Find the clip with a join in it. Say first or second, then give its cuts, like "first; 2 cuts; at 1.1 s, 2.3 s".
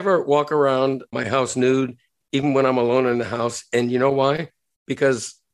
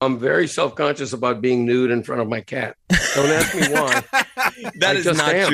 first; 1 cut; at 1.1 s